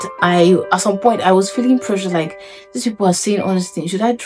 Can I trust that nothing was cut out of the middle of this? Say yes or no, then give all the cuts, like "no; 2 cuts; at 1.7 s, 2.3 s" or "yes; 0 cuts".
yes; 0 cuts